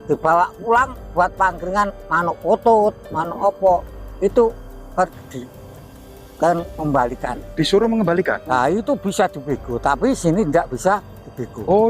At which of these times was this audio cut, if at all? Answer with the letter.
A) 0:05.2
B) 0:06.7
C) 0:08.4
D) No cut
C